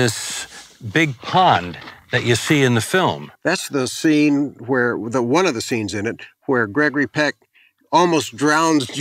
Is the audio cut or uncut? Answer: cut